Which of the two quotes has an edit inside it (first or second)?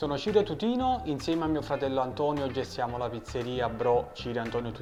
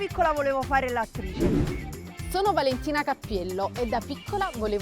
second